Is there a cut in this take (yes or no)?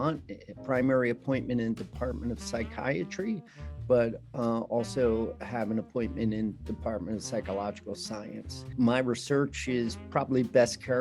yes